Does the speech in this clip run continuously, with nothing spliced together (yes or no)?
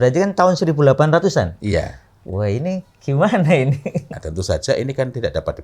no